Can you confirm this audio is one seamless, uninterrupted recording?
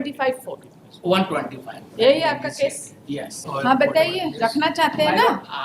no; 1 cut; at 3.4 s

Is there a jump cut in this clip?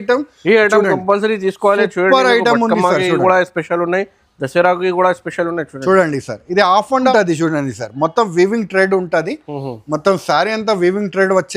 yes; 1 cut; at 7.1 s

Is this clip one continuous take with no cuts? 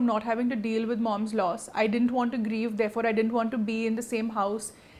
yes; 0 cuts

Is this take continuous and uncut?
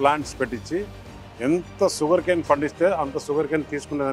yes; 0 cuts

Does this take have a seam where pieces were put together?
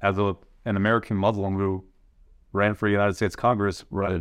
no; 0 cuts

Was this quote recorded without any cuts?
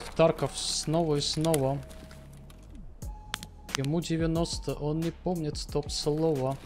yes; 0 cuts

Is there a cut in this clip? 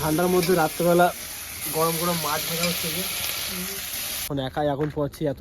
yes; 1 cut; at 4.3 s

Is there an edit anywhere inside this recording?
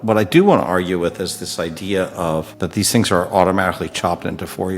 yes; 1 cut; at 2.5 s

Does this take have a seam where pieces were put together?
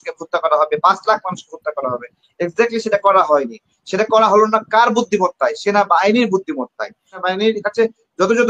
yes; 1 cut; at 7.1 s

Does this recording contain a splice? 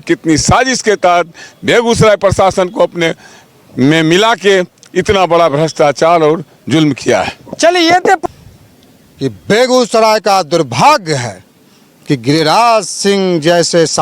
yes; 1 cut; at 8.2 s

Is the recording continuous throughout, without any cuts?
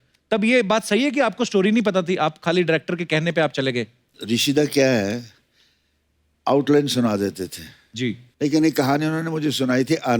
no; 2 cuts; at 4.1 s, 8.2 s

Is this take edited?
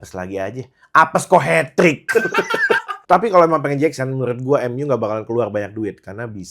yes; 1 cut; at 2.9 s

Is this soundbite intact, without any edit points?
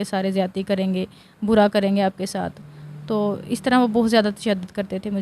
yes; 0 cuts

